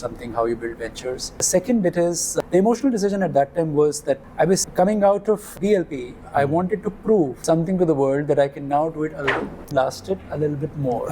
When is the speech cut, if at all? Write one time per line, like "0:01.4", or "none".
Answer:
0:01.3
0:02.3
0:04.3
0:05.5
0:07.4
0:09.7